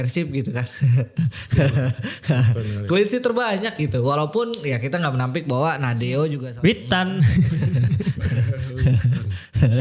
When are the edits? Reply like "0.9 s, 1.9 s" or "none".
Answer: 6.4 s